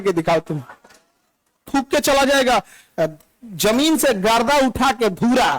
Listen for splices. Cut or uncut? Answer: cut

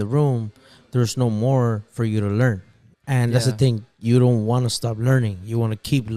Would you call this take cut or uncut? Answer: uncut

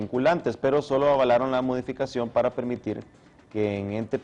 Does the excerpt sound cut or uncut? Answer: cut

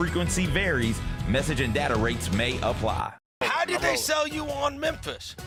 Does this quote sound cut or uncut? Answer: uncut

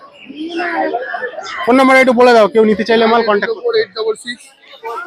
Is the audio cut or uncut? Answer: cut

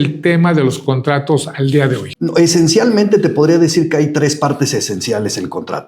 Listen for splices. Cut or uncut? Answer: cut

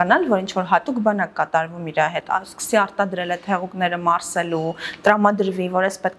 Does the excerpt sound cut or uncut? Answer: uncut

